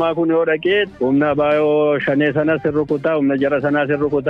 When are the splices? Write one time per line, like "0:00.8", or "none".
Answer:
0:00.9